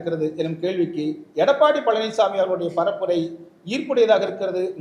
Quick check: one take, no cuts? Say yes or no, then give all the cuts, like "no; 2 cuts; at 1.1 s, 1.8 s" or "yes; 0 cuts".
yes; 0 cuts